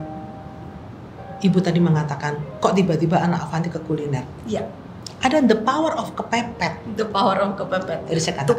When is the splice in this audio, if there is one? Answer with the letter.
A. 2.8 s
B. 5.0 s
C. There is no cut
C